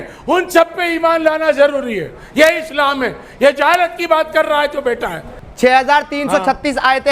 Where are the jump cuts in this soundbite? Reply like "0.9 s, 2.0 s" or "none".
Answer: 5.4 s